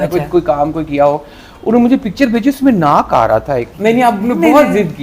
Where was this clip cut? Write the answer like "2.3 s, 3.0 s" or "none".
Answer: 3.7 s